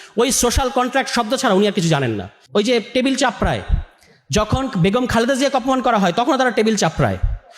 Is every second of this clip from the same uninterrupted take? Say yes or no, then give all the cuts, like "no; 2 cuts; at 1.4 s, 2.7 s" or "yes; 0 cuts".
no; 1 cut; at 2.3 s